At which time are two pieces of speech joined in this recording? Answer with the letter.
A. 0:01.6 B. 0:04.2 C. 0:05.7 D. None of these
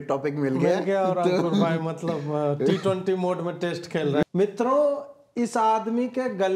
B